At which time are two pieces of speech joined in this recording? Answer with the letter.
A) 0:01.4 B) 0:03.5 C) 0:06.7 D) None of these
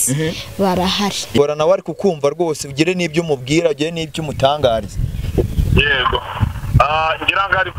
A